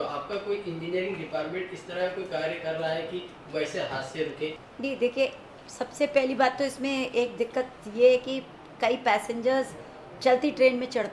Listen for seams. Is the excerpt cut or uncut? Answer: cut